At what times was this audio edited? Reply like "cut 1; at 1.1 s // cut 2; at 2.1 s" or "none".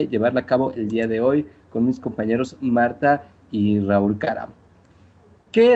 none